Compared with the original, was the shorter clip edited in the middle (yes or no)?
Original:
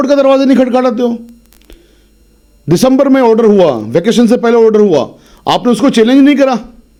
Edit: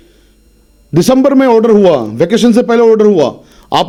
no